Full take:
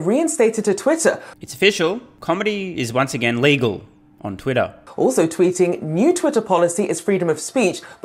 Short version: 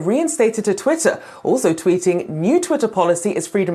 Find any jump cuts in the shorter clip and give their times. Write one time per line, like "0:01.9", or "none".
0:01.3